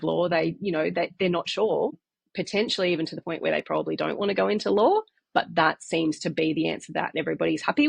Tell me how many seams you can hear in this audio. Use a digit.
1